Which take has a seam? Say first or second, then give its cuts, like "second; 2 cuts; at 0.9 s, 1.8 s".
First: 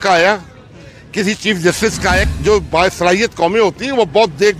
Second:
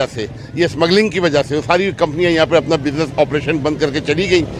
first; 1 cut; at 2.3 s